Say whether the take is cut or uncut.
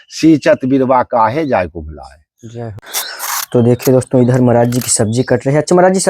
cut